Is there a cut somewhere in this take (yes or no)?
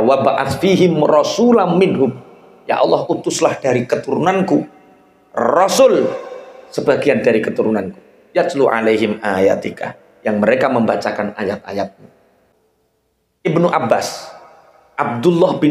yes